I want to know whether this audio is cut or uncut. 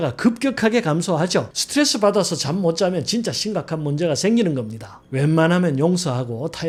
uncut